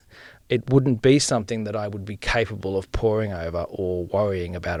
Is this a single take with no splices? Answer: yes; 0 cuts

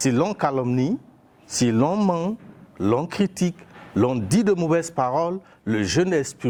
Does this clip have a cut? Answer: no; 0 cuts

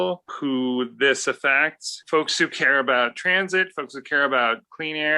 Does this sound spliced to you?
yes; 1 cut; at 1.9 s

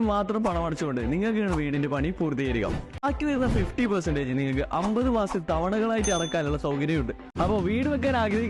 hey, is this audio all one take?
yes; 0 cuts

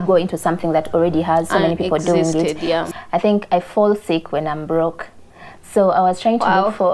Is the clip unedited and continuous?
no; 1 cut; at 2.9 s

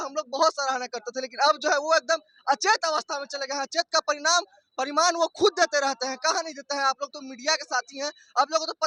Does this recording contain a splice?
no; 0 cuts

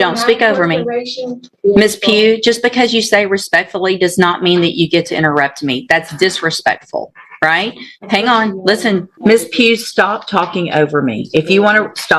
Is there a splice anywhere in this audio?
yes; 2 cuts; at 1.5 s, 9.1 s

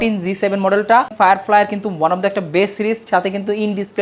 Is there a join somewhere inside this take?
yes; 1 cut; at 1.1 s

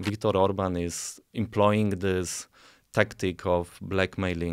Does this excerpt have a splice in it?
yes; 1 cut; at 1.2 s

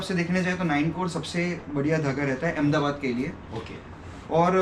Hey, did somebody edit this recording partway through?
no; 0 cuts

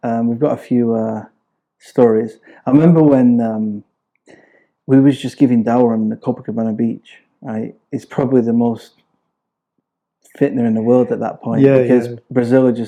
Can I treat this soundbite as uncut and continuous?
yes; 0 cuts

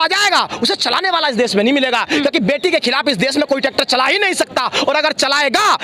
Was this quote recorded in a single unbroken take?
yes; 0 cuts

